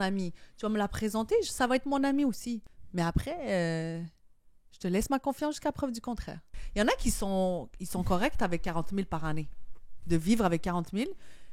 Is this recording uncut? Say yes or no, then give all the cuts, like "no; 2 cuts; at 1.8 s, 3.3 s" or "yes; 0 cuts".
no; 2 cuts; at 2.7 s, 6.6 s